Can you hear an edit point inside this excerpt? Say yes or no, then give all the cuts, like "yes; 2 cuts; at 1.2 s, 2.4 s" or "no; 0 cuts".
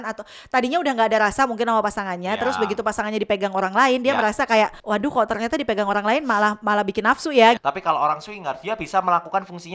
yes; 2 cuts; at 4.8 s, 7.6 s